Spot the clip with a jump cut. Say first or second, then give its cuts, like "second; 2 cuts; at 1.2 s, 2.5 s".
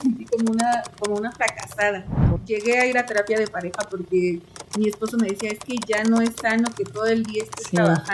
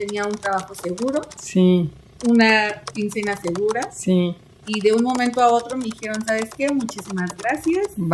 first; 1 cut; at 2.3 s